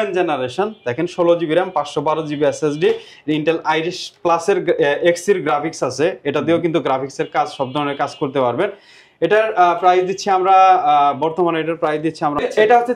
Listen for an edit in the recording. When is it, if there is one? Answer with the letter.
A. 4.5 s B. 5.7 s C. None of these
C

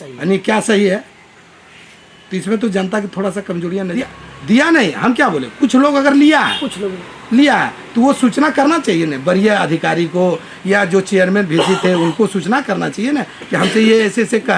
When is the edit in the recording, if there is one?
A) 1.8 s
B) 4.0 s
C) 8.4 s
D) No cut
B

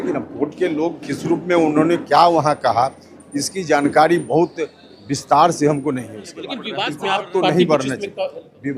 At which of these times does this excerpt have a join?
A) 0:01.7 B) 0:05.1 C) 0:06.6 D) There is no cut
C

